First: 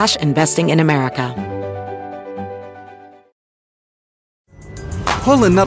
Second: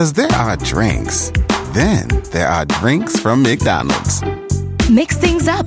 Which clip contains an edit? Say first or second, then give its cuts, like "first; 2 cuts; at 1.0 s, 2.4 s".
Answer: first; 1 cut; at 1.3 s